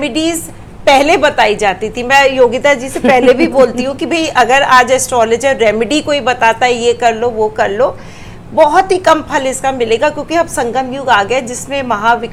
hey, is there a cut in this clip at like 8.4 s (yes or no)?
no